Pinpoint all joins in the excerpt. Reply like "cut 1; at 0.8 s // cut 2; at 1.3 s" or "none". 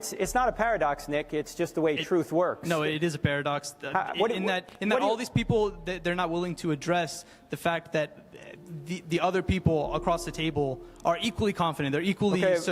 none